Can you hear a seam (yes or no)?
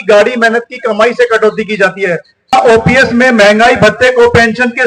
yes